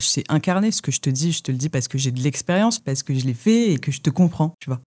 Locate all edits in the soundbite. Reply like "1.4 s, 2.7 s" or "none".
2.9 s